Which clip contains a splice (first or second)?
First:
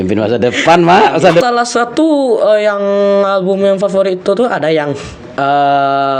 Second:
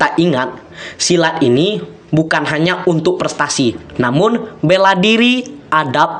first